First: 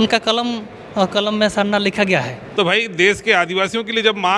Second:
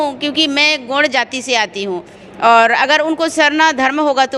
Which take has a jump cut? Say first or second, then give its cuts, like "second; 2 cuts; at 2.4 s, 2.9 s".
first; 1 cut; at 2.4 s